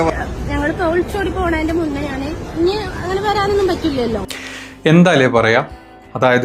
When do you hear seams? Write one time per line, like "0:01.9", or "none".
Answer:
0:04.3